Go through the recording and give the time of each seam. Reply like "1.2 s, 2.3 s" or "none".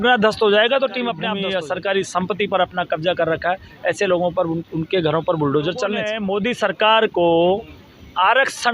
1.2 s, 6.2 s